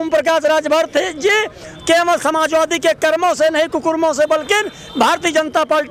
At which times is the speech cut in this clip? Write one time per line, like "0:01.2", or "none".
none